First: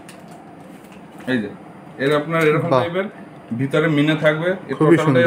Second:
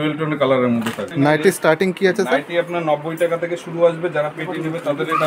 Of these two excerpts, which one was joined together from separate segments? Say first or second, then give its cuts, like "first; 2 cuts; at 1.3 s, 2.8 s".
second; 1 cut; at 1.0 s